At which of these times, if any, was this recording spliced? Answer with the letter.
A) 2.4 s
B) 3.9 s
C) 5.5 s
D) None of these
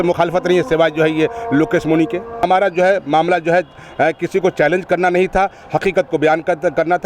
A